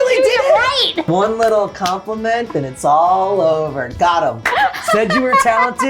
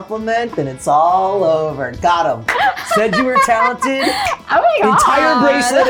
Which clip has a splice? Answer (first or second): first